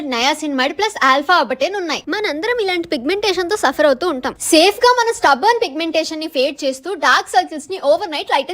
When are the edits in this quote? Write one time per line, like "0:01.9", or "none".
0:02.0
0:04.3